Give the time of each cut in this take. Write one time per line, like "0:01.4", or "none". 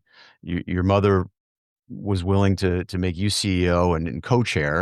none